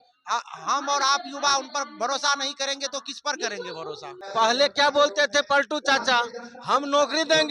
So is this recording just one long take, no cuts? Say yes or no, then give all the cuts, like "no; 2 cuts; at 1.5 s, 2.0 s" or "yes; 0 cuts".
no; 1 cut; at 4.2 s